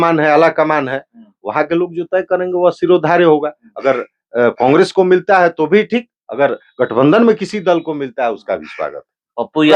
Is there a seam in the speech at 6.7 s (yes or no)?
no